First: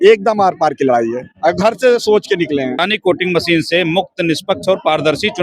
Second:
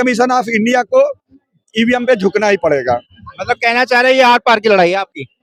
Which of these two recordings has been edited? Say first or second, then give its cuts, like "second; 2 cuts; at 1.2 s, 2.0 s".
first; 1 cut; at 2.8 s